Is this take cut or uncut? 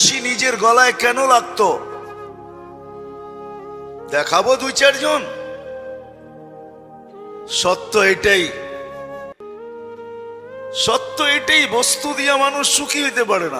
cut